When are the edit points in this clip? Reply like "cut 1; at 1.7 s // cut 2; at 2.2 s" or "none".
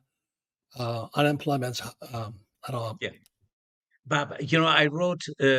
none